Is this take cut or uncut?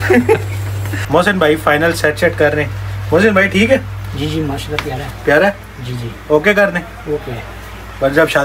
uncut